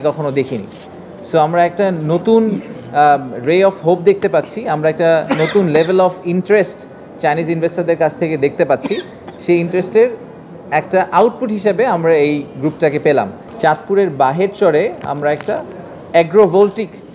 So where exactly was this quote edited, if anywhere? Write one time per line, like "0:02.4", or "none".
0:13.4